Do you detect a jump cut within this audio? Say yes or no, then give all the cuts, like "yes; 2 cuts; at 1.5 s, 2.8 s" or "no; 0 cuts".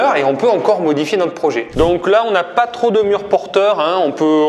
yes; 1 cut; at 1.6 s